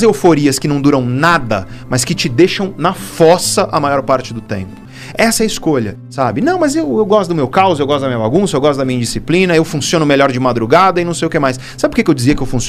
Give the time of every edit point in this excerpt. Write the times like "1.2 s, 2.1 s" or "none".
5.9 s

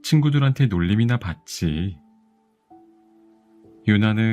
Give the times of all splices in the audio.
2.0 s, 3.4 s

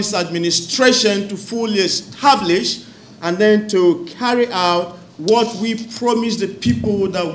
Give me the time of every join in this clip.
none

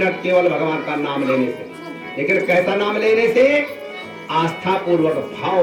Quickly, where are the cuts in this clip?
none

